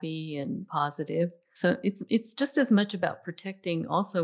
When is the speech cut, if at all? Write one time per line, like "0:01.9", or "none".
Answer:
0:01.4